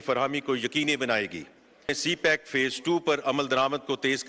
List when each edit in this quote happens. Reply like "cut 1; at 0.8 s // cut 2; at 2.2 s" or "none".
cut 1; at 2.0 s